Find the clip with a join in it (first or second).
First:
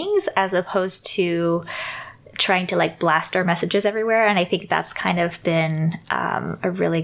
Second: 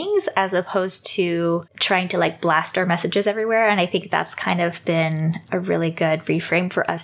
second